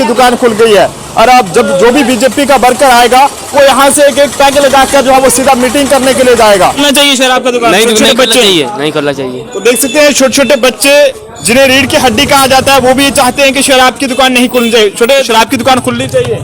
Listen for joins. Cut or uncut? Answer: cut